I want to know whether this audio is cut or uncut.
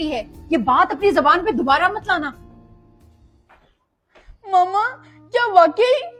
uncut